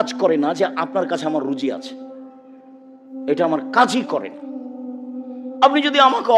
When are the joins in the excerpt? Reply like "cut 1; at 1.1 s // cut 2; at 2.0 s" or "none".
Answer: cut 1; at 1.8 s // cut 2; at 3.3 s